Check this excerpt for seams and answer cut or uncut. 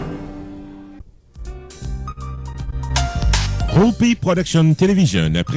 cut